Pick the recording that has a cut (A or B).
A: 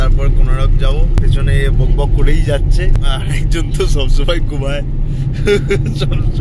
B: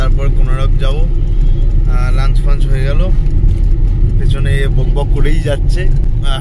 A